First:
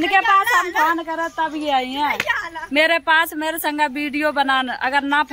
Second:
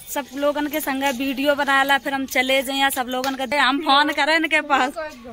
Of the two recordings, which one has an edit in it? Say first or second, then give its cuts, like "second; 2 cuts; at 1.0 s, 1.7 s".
second; 1 cut; at 3.5 s